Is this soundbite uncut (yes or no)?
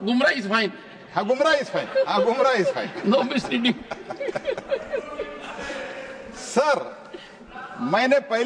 yes